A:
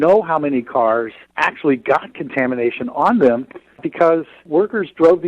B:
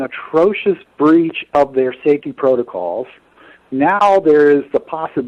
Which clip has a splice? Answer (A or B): A